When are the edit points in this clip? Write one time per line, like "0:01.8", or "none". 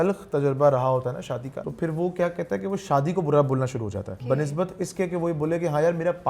0:01.6
0:04.1